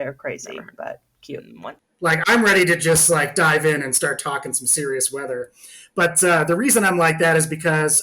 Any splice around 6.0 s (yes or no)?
no